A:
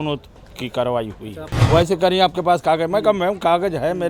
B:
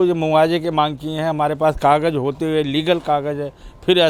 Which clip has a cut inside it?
A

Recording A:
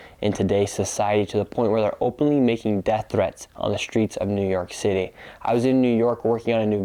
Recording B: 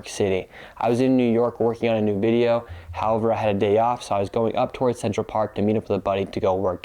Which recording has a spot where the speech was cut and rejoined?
B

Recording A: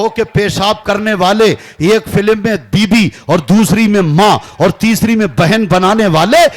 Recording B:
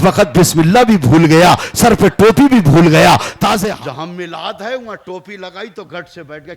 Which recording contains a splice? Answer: B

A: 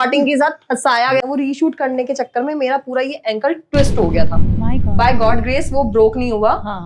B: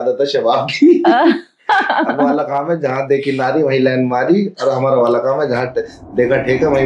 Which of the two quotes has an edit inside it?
A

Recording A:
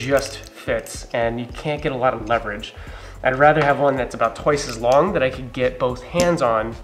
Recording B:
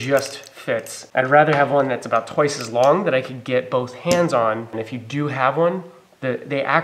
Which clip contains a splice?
B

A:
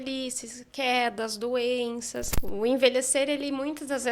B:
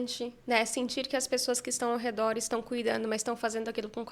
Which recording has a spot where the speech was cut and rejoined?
A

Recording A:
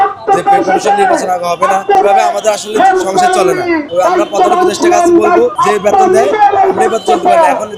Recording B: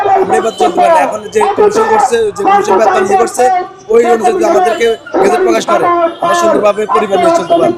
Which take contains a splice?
A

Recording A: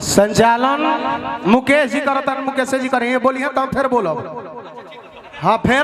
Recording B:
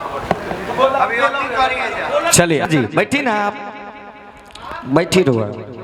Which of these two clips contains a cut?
B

